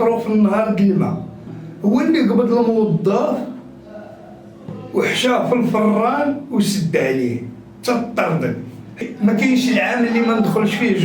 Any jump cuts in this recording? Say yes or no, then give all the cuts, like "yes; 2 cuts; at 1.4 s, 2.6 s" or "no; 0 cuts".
yes; 2 cuts; at 1.7 s, 9.1 s